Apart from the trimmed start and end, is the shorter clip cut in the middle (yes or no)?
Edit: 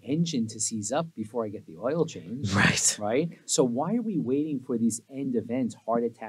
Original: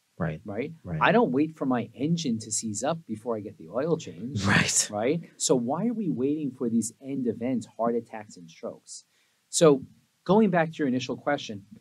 no